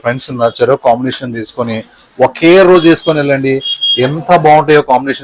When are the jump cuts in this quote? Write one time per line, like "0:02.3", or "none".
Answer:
none